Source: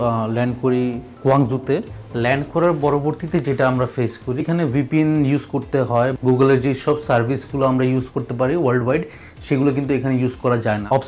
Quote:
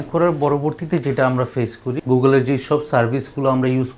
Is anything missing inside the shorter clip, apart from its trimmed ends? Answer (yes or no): yes